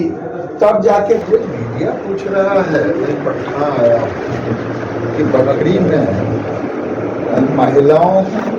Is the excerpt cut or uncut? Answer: cut